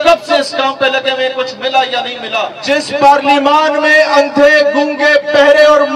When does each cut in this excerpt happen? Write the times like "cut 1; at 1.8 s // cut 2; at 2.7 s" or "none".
cut 1; at 2.6 s